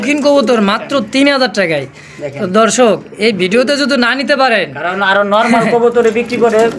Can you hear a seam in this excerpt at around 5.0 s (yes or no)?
no